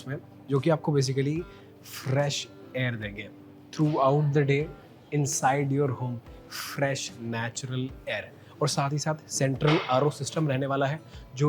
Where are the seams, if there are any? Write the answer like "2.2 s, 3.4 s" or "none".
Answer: none